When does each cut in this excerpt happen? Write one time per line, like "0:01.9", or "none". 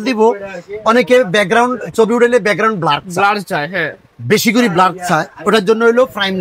none

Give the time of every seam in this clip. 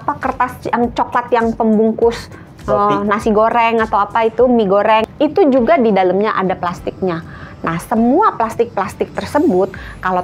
0:05.1

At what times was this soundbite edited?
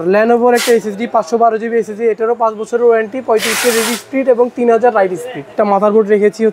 0:05.5

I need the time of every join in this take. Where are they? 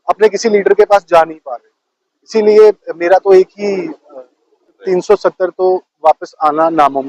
0:04.8

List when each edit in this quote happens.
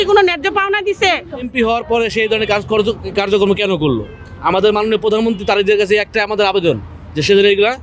0:01.5

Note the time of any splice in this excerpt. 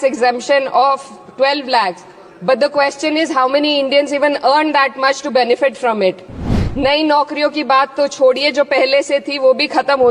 0:06.5

